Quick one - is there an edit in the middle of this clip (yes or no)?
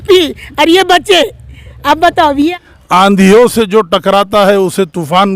yes